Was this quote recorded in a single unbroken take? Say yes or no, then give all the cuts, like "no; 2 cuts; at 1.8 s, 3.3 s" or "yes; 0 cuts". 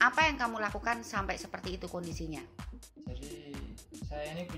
yes; 0 cuts